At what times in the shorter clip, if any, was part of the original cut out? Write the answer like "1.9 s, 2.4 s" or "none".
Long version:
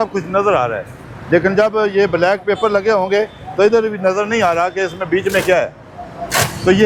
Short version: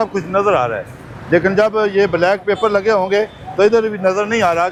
none